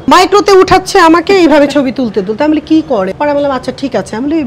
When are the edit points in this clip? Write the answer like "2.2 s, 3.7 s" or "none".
3.1 s